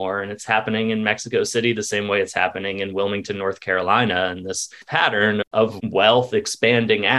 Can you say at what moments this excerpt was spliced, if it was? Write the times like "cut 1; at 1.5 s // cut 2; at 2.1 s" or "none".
cut 1; at 4.9 s // cut 2; at 5.8 s